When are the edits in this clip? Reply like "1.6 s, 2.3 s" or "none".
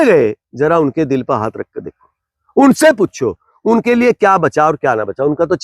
none